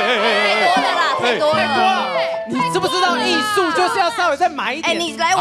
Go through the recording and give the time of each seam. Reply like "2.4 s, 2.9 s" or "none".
none